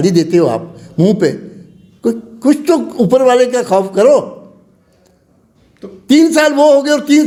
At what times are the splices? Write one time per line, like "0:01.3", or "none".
none